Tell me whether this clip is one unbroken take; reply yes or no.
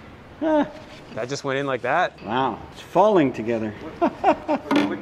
no